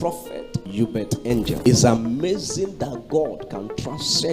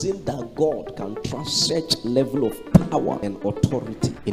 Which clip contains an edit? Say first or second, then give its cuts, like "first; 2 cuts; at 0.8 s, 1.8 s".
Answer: first; 1 cut; at 1.6 s